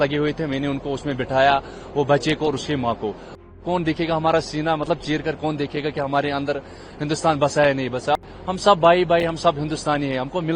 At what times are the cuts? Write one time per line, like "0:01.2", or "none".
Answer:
0:03.4
0:08.2